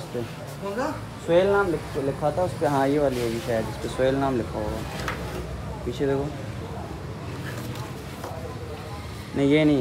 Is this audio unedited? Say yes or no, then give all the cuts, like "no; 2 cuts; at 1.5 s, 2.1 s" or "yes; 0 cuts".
yes; 0 cuts